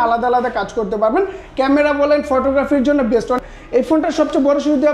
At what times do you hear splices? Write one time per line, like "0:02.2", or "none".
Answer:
0:03.4